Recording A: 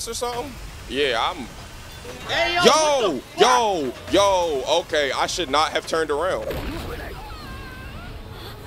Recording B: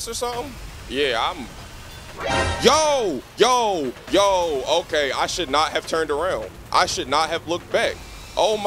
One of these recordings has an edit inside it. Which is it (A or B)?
A